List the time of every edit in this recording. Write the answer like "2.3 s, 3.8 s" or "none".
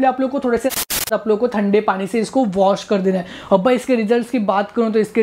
1.1 s